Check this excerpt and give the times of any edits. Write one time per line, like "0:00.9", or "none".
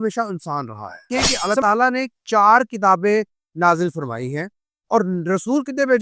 0:01.1